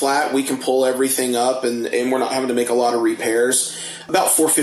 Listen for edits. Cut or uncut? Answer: uncut